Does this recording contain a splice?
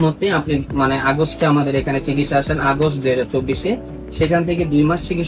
no; 0 cuts

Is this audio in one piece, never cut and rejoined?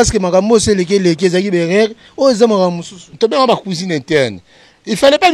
no; 1 cut; at 3.1 s

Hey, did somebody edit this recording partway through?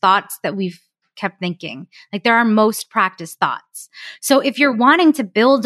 no; 0 cuts

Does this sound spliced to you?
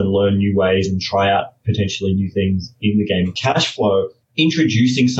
yes; 2 cuts; at 3.3 s, 4.2 s

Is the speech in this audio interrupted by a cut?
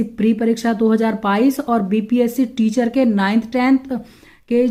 no; 0 cuts

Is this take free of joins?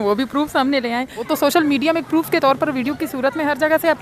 no; 1 cut; at 1.2 s

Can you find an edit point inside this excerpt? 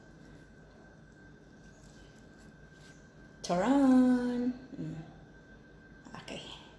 no; 0 cuts

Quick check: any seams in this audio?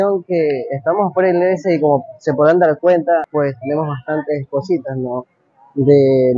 no; 0 cuts

